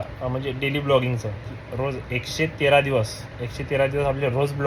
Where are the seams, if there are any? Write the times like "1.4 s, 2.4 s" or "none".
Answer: none

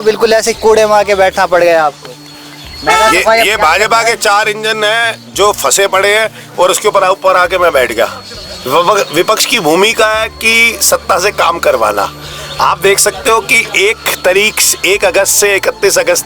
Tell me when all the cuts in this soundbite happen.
none

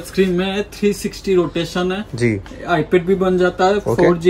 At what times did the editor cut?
none

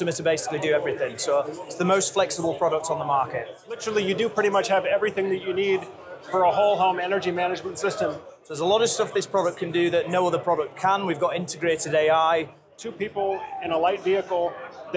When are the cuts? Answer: 3.8 s, 8.4 s, 12.7 s

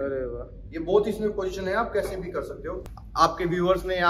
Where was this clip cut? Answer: 2.9 s

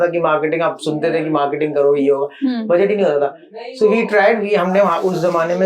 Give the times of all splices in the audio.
none

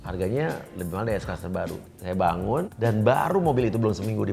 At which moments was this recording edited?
1.9 s, 2.7 s

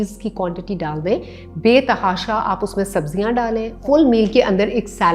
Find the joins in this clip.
3.8 s

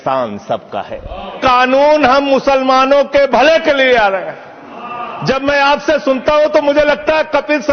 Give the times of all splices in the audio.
1.4 s

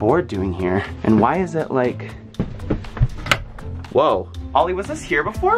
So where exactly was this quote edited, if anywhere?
none

